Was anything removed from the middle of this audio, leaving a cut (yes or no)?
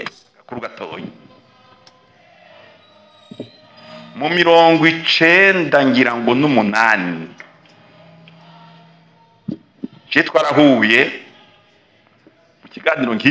no